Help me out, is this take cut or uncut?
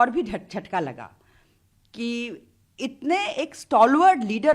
uncut